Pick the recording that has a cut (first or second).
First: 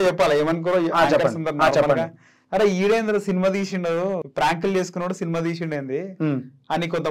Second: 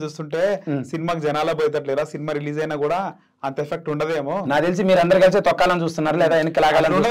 first